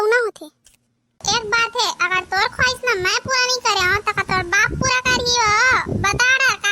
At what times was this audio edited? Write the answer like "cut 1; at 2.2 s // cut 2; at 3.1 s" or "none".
cut 1; at 1.2 s